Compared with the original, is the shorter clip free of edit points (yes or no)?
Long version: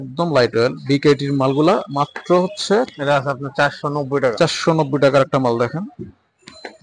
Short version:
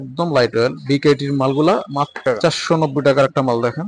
no